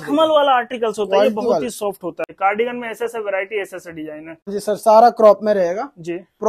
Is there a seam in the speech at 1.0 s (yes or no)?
no